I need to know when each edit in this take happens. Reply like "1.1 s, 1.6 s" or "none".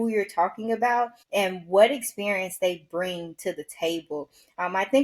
1.2 s